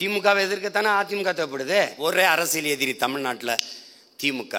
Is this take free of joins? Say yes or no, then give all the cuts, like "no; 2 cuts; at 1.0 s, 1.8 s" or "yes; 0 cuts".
no; 1 cut; at 1.9 s